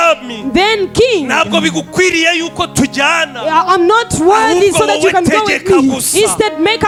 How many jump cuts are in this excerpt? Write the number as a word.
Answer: zero